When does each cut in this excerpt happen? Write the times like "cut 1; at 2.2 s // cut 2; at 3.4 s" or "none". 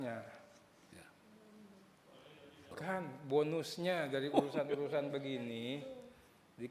cut 1; at 2.7 s